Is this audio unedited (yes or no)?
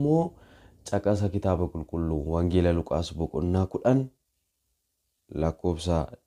yes